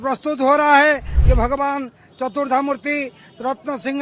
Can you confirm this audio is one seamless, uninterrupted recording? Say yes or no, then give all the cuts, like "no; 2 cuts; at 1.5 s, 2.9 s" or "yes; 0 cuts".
no; 1 cut; at 1.1 s